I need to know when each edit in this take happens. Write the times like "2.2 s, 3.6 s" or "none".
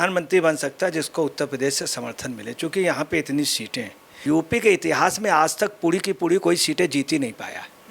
4.2 s